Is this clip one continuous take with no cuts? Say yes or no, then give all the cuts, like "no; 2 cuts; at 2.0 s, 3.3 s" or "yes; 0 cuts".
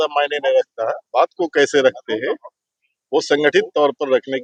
yes; 0 cuts